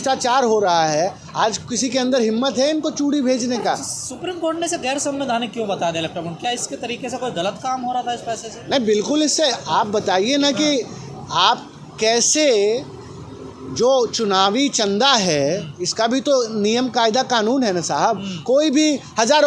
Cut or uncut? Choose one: uncut